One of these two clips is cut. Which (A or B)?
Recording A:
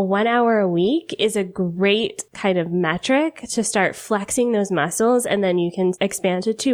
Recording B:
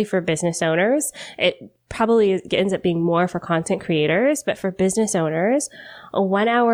A